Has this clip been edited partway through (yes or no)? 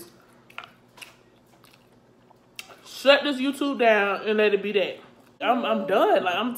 yes